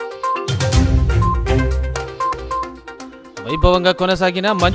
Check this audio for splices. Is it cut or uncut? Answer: cut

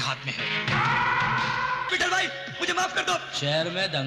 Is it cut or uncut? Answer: cut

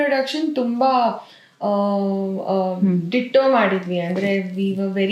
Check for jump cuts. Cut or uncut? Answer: uncut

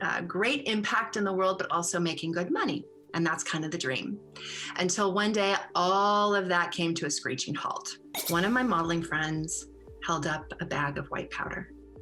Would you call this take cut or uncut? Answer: cut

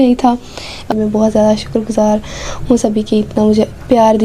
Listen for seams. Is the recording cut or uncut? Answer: cut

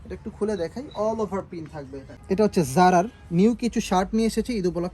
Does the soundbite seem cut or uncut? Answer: cut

